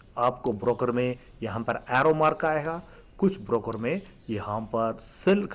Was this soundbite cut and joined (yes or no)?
no